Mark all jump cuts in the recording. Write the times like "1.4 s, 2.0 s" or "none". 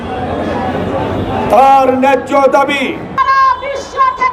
3.2 s

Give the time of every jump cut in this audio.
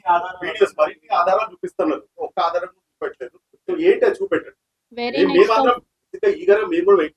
none

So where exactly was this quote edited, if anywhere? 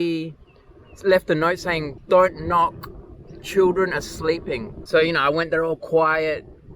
1.9 s, 4.7 s

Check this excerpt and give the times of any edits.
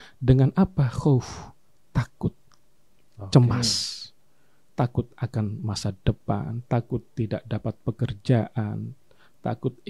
none

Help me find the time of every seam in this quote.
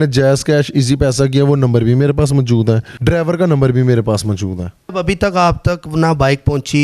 2.9 s, 4.8 s

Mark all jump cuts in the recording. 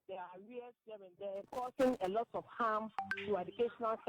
1.7 s

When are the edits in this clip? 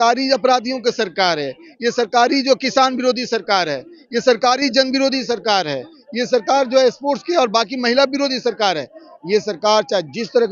none

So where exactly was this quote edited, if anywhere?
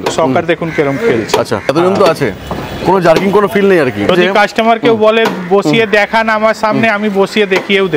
1.7 s, 4.1 s

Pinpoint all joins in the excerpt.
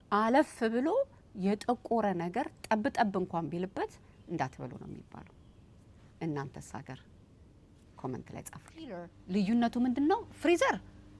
9.1 s

